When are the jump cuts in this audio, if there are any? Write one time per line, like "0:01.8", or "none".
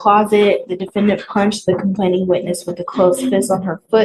none